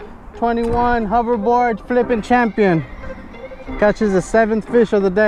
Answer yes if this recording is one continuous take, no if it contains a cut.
yes